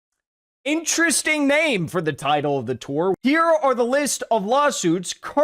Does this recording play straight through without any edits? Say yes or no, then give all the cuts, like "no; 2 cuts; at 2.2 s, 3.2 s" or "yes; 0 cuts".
no; 1 cut; at 3.2 s